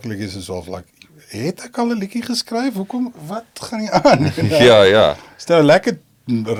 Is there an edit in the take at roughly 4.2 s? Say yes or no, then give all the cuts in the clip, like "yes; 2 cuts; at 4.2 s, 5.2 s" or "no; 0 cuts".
no; 0 cuts